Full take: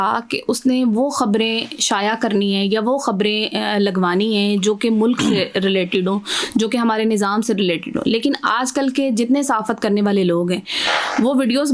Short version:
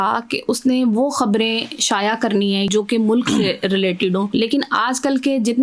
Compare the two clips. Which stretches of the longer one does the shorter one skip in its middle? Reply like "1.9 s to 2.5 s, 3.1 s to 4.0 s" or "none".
2.7 s to 4.6 s, 6.2 s to 8.0 s